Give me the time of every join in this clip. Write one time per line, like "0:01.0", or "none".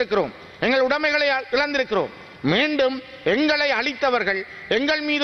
none